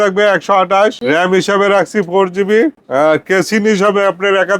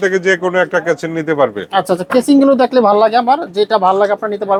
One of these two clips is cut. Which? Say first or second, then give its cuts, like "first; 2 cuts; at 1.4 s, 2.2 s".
first; 2 cuts; at 1.0 s, 2.8 s